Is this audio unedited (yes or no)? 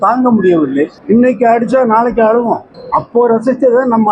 no